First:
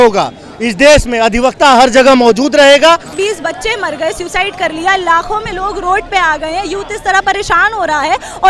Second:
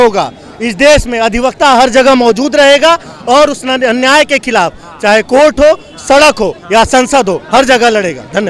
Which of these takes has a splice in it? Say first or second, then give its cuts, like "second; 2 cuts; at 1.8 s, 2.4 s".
first; 1 cut; at 3.1 s